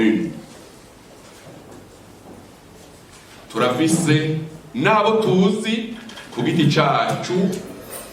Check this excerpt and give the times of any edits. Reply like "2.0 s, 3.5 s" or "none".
none